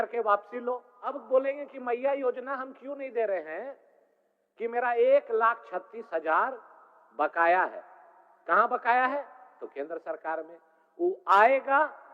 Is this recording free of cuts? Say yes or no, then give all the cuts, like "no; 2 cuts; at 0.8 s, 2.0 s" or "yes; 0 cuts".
no; 1 cut; at 1.2 s